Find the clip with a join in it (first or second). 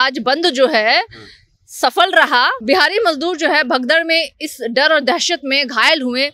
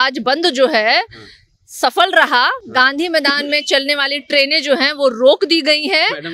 first